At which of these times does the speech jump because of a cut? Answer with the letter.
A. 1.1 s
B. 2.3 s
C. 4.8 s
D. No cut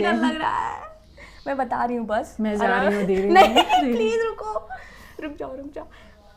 D